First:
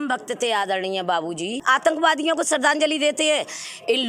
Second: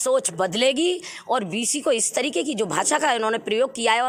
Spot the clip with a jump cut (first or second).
first